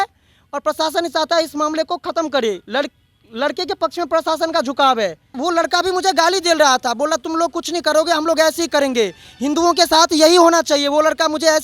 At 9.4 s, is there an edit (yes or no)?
no